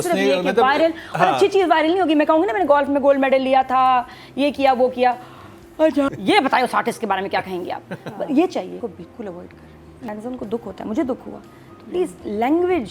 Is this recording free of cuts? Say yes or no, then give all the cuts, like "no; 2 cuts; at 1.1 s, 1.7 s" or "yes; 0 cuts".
no; 3 cuts; at 6.1 s, 8.8 s, 10.1 s